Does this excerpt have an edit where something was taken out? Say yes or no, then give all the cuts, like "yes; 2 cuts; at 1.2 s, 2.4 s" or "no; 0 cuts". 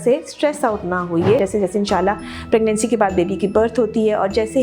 yes; 1 cut; at 1.4 s